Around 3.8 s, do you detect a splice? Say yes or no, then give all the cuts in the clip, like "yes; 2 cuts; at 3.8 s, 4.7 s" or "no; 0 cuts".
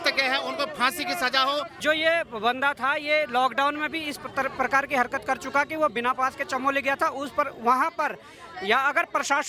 no; 1 cut; at 1.8 s